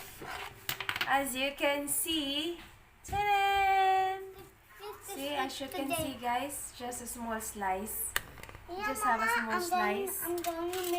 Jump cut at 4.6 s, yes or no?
yes